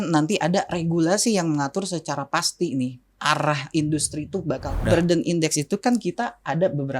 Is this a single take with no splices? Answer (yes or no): no